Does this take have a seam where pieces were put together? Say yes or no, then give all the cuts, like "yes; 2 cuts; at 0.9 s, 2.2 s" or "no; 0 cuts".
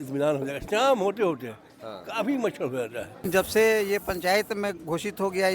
yes; 1 cut; at 3.3 s